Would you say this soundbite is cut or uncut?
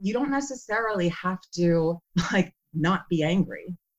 uncut